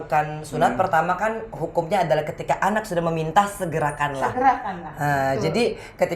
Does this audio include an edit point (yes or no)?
no